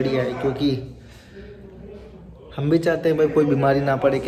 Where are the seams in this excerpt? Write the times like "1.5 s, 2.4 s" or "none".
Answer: none